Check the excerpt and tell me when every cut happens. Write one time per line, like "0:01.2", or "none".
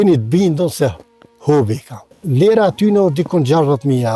0:02.2